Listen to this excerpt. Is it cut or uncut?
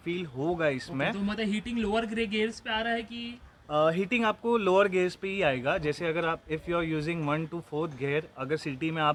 uncut